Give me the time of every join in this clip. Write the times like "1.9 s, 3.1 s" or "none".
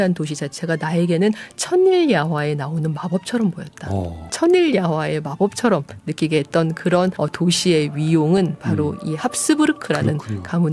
4.3 s, 7.2 s